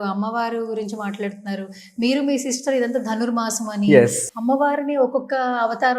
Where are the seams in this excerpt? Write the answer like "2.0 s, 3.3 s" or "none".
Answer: 4.2 s